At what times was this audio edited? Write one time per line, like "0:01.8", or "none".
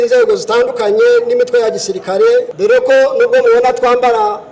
0:02.5

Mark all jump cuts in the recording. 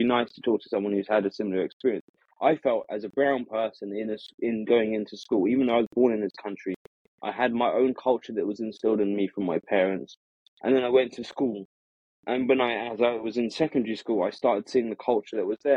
none

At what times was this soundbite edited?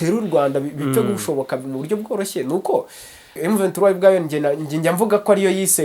0:03.4

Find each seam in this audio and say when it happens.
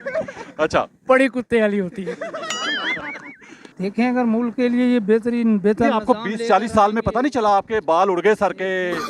0:03.6

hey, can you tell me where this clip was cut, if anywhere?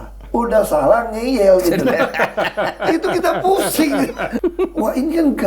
0:04.3

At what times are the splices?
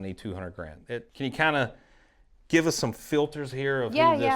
0:01.1

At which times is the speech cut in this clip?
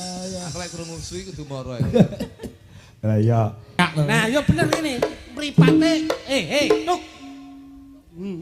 0:03.8

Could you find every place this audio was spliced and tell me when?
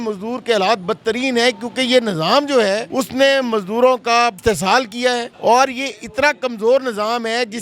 0:02.9
0:04.4
0:05.3

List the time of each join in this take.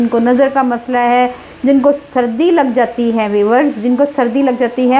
none

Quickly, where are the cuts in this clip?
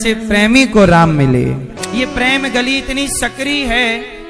0:01.7

